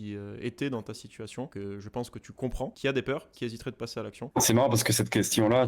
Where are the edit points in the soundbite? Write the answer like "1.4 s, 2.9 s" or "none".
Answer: 1.5 s, 2.7 s